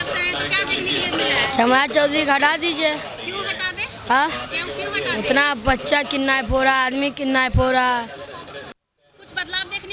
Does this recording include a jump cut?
no; 0 cuts

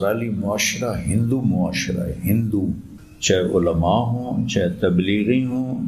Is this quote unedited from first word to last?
yes; 0 cuts

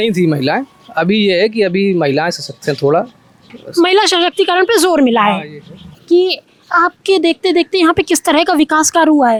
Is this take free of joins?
yes; 0 cuts

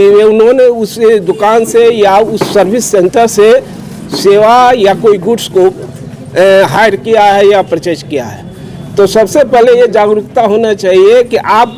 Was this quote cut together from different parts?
no; 0 cuts

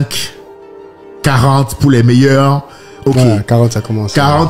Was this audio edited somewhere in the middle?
no; 0 cuts

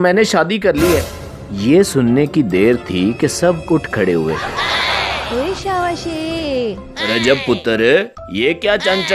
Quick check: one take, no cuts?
yes; 0 cuts

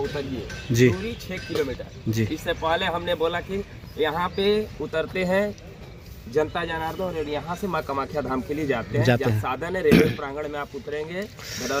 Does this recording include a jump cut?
no; 0 cuts

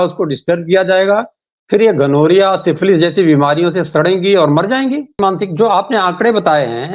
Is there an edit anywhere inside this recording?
yes; 1 cut; at 5.2 s

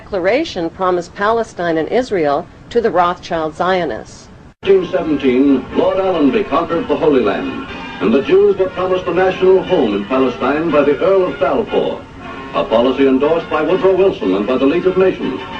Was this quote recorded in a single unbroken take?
no; 1 cut; at 2.7 s

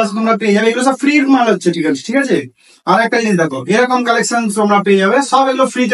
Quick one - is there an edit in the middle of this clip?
no; 0 cuts

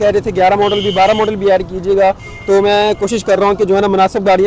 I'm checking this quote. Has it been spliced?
no; 0 cuts

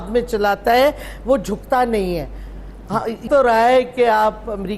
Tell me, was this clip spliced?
yes; 1 cut; at 3.3 s

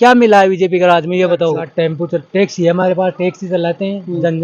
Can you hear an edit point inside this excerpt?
yes; 1 cut; at 1.7 s

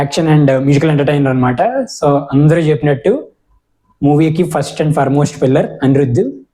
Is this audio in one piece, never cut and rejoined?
yes; 0 cuts

